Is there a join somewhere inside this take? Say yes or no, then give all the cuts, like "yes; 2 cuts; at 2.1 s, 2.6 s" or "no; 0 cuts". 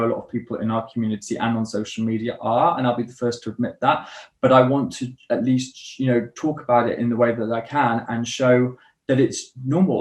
no; 0 cuts